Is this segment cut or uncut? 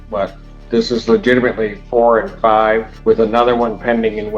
cut